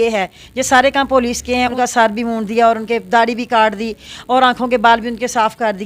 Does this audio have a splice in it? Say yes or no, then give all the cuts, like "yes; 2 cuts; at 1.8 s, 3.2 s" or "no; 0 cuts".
yes; 1 cut; at 1.7 s